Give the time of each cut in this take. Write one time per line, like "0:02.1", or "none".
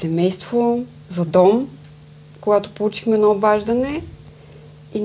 none

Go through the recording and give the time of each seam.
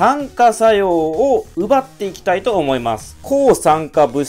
0:03.2

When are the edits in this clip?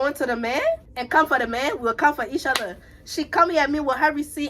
0:00.9

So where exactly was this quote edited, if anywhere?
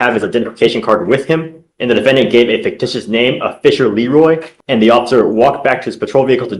0:04.5

